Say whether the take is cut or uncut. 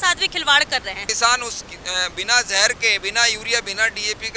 cut